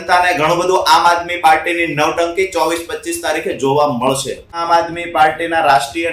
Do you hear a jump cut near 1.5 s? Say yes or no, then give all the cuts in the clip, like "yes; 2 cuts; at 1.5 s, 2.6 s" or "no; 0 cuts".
no; 1 cut; at 4.6 s